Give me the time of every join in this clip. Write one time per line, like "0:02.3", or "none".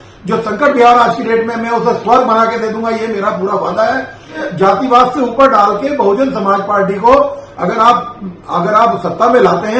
0:04.3